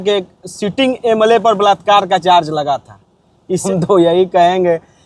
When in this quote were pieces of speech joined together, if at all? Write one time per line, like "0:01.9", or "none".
0:03.6